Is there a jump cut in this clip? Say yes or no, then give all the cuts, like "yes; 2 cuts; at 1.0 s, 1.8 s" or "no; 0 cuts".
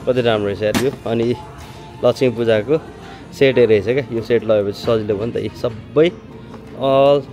no; 0 cuts